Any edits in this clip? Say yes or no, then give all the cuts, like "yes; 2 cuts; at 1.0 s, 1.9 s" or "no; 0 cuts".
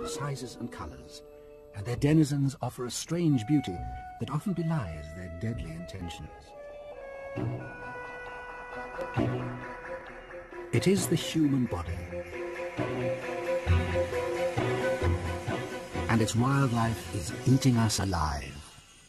yes; 1 cut; at 12.9 s